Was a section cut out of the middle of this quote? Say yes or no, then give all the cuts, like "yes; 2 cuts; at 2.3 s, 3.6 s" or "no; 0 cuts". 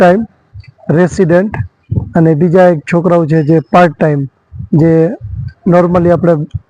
no; 0 cuts